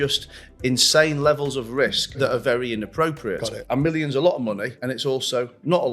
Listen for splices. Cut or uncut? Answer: cut